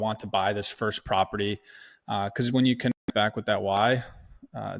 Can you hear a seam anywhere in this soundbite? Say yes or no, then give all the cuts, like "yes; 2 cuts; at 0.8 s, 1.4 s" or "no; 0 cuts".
no; 0 cuts